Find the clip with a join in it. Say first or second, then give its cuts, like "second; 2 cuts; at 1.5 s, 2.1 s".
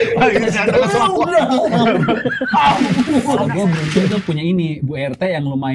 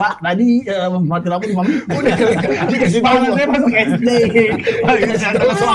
first; 1 cut; at 3.5 s